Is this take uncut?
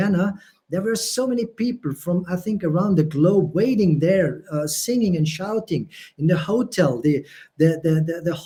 yes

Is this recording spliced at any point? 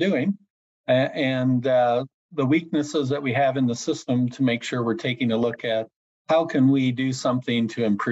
no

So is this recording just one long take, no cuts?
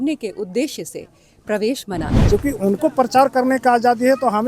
no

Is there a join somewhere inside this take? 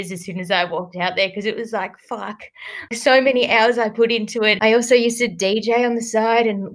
yes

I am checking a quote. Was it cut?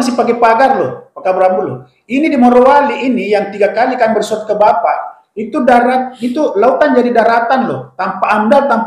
no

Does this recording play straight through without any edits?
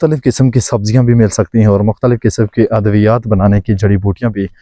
yes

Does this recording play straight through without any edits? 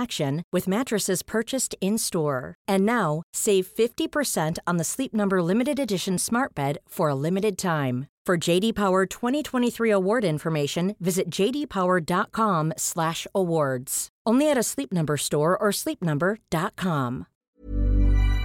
no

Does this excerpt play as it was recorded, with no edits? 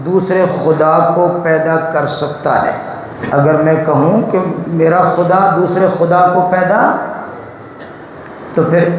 no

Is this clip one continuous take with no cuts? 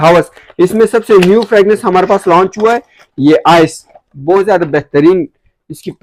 yes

